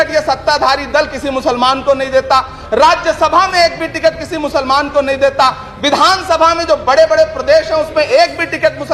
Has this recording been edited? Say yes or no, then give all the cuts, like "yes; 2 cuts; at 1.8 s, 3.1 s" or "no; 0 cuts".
no; 0 cuts